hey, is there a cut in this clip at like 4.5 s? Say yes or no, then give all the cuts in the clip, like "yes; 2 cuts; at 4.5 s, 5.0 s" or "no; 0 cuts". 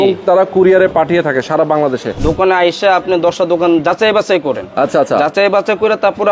no; 1 cut; at 2.1 s